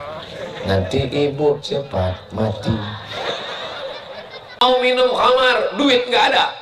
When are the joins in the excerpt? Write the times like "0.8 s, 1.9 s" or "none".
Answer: 4.6 s